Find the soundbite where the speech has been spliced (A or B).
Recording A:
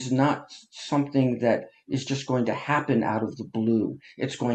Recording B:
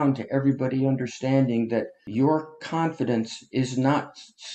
B